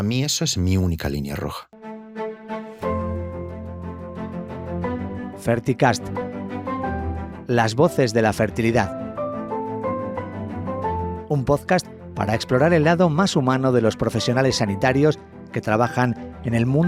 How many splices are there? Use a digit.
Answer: 1